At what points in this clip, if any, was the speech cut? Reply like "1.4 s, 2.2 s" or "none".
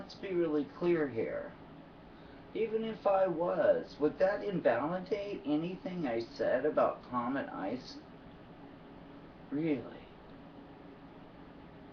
5.0 s